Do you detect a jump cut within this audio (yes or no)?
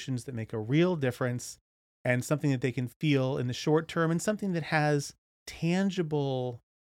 yes